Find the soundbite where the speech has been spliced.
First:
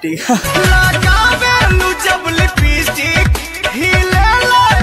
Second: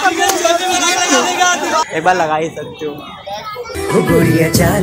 second; 1 cut; at 1.9 s

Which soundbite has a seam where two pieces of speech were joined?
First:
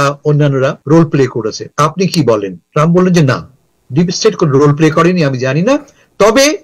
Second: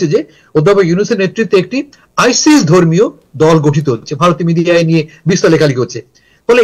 first; 3 cuts; at 0.8 s, 1.6 s, 2.6 s

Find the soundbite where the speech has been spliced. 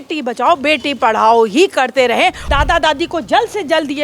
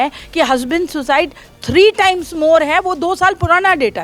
first; 1 cut; at 2.4 s

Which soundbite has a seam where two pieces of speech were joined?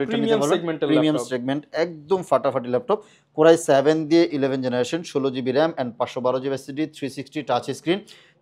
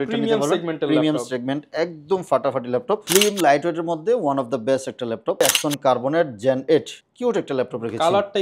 second; 3 cuts; at 3.0 s, 5.4 s, 7.0 s

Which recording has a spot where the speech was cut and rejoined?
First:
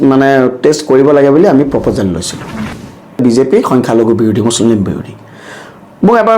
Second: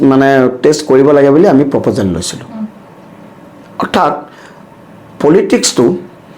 first; 1 cut; at 3.2 s

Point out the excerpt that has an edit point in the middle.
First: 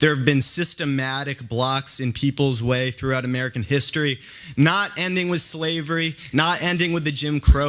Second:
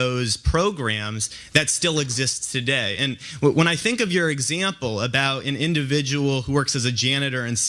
first; 1 cut; at 5.2 s

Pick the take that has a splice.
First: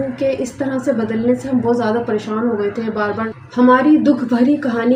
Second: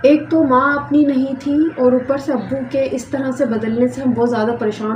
first; 1 cut; at 3.4 s

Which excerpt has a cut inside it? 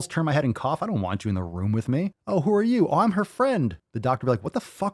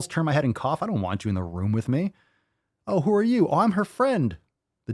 first; 2 cuts; at 2.2 s, 3.9 s

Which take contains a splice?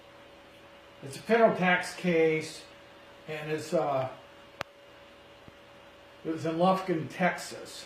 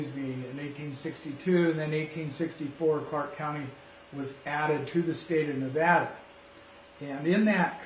first; 1 cut; at 1.6 s

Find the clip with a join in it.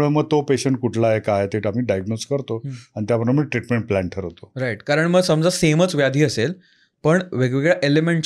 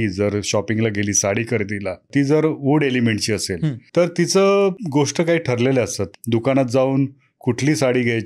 second; 4 cuts; at 2.1 s, 3.8 s, 4.8 s, 6.1 s

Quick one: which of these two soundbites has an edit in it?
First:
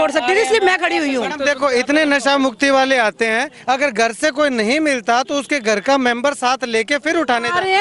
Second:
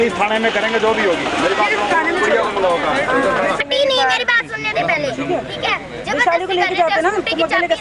second; 1 cut; at 3.6 s

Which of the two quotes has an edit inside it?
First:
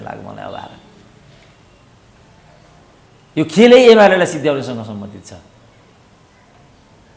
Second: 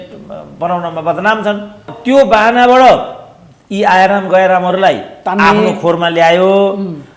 second; 1 cut; at 1.9 s

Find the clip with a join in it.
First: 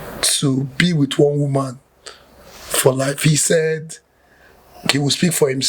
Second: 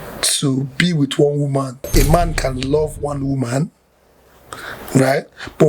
second; 1 cut; at 1.9 s

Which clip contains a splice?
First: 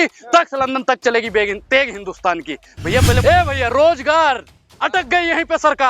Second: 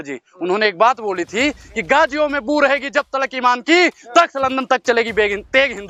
first; 1 cut; at 3.2 s

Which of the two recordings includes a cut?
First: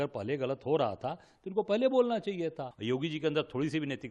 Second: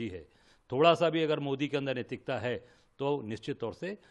first; 1 cut; at 2.7 s

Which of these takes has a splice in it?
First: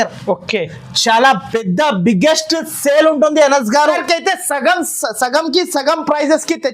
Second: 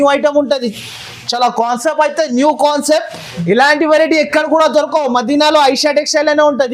first; 1 cut; at 4.0 s

